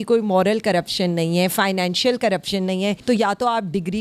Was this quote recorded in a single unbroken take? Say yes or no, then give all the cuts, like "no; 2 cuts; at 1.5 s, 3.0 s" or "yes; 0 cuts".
no; 1 cut; at 3.0 s